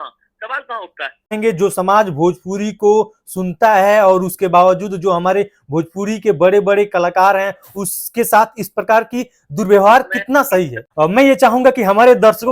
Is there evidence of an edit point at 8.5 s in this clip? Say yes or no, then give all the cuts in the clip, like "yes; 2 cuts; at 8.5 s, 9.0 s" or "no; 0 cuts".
no; 2 cuts; at 1.3 s, 10.8 s